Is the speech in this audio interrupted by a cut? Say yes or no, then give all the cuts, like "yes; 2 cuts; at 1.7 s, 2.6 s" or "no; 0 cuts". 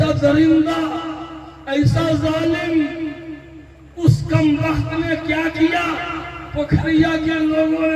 no; 0 cuts